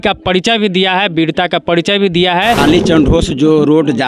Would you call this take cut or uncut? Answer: cut